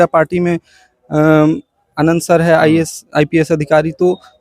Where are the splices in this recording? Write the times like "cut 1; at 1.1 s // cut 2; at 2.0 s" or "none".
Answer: none